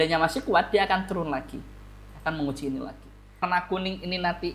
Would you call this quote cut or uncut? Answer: cut